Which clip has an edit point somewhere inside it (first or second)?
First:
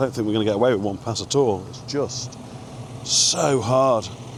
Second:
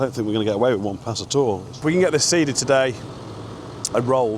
second